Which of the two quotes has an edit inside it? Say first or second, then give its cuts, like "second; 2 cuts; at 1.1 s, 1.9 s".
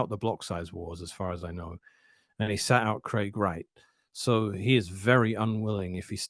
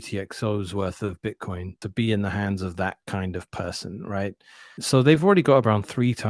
second; 2 cuts; at 1.8 s, 4.8 s